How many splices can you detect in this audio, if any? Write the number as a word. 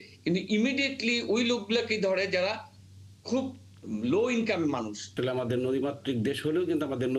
one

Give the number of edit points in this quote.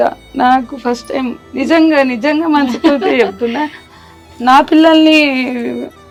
zero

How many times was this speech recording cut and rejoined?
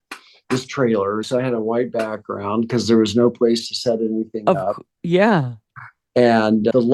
one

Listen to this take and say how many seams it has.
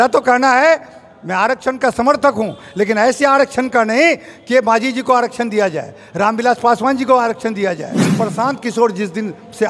one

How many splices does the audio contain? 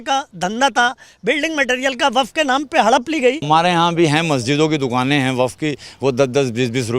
one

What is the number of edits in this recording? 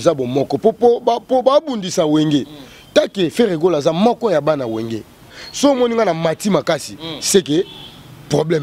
one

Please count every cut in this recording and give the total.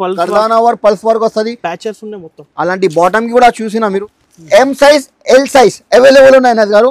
one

